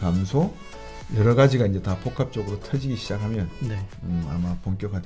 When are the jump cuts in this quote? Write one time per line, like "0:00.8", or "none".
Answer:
none